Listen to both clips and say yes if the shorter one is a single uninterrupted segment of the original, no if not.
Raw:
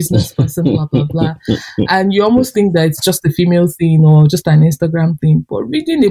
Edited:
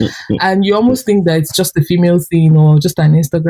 yes